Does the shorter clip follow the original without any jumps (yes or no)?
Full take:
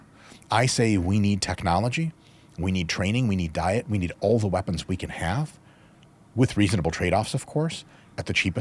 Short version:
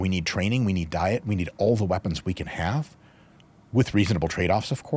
yes